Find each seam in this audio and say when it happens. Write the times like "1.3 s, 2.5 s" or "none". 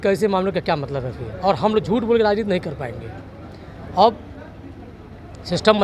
none